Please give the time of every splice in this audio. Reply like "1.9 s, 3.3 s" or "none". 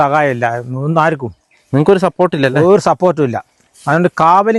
none